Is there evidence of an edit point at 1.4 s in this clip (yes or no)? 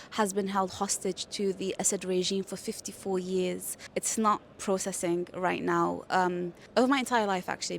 no